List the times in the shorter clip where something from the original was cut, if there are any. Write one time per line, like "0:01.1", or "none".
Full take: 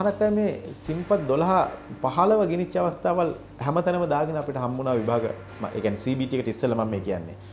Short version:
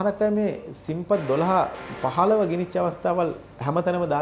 none